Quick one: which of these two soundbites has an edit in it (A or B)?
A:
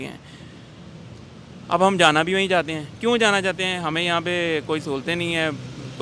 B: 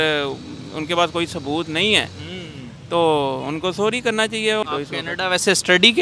B